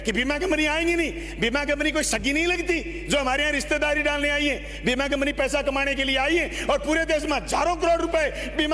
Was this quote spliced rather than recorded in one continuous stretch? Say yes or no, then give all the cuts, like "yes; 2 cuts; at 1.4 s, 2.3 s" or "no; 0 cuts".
no; 0 cuts